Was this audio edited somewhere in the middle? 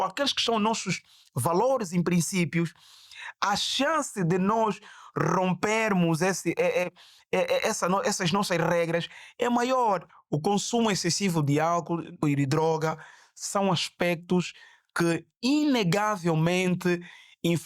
yes; 2 cuts; at 10.2 s, 12.2 s

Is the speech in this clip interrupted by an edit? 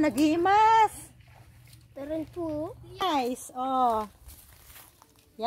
yes; 1 cut; at 3.0 s

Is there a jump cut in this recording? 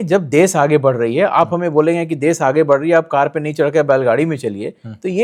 no; 0 cuts

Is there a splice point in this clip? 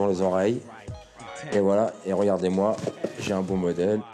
no; 0 cuts

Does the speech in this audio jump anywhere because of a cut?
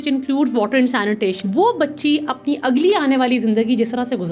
yes; 1 cut; at 1.4 s

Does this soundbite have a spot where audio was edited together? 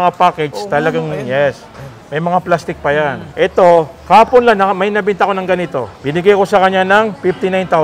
yes; 2 cuts; at 3.2 s, 5.9 s

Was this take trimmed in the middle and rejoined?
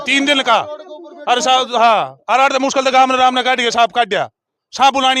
no; 0 cuts

